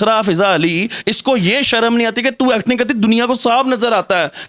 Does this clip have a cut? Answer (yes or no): no